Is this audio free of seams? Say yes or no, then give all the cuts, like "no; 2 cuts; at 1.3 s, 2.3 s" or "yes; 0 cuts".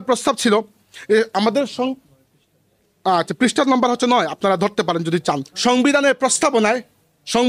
no; 1 cut; at 5.5 s